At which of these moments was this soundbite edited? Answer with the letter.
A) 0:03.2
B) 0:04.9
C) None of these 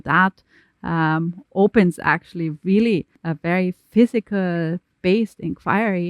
A